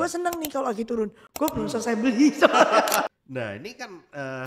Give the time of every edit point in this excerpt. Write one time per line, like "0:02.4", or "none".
0:03.1